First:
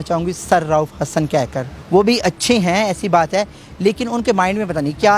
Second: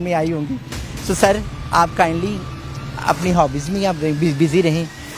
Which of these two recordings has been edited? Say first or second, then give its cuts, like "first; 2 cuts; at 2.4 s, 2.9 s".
first; 1 cut; at 1.7 s